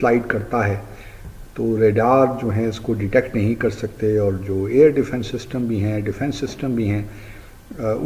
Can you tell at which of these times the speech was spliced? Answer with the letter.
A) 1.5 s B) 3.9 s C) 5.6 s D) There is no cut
D